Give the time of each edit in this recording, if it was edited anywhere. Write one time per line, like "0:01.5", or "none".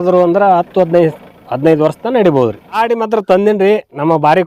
0:02.8